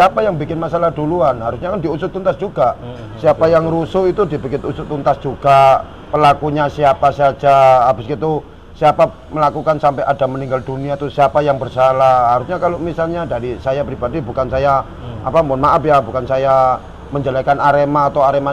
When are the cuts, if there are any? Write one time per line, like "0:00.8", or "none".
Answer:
none